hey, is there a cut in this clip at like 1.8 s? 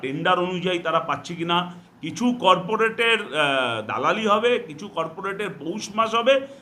yes; 1 cut; at 1.8 s

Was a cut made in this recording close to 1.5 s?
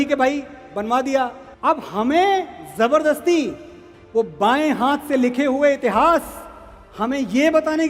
yes; 1 cut; at 1.5 s

